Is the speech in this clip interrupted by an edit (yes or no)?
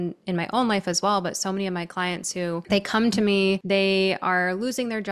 yes